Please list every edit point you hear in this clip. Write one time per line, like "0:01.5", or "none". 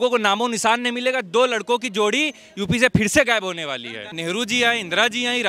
0:04.1

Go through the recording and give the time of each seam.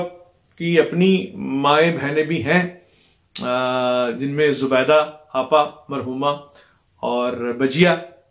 none

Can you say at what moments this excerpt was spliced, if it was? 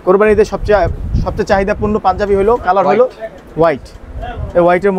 none

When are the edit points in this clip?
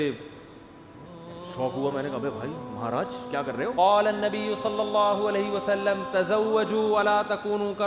0:03.7

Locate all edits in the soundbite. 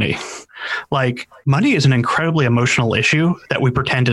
0:01.3

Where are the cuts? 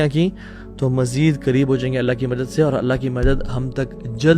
none

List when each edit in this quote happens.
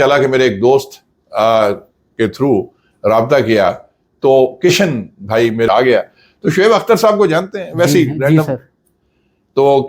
0:05.7

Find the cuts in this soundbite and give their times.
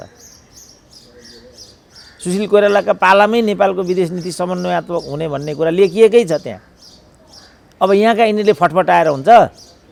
none

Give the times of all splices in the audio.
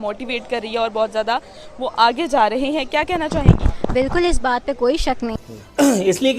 0:05.3

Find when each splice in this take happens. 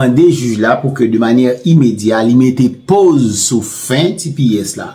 none

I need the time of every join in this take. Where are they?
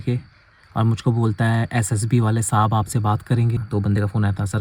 0:03.6

